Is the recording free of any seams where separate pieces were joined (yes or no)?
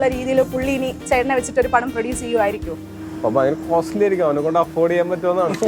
yes